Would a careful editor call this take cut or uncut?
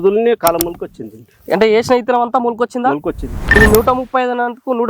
cut